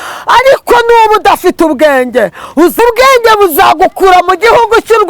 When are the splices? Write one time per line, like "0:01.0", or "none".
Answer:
0:02.8